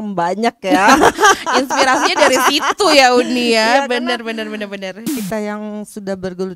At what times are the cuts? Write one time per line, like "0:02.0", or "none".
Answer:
0:05.1